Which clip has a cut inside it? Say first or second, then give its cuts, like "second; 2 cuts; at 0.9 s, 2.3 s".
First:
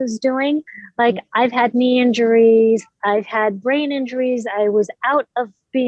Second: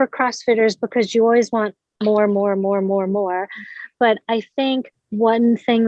second; 1 cut; at 5.0 s